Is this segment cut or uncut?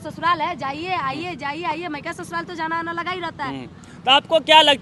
uncut